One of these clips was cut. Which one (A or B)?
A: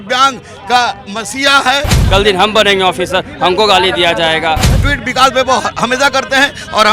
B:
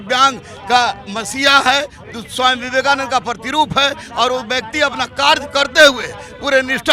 A